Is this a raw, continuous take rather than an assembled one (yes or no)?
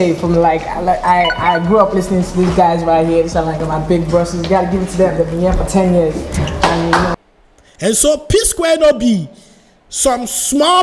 no